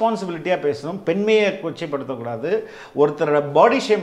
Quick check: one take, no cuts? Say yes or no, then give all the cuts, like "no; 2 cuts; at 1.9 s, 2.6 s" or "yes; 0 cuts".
yes; 0 cuts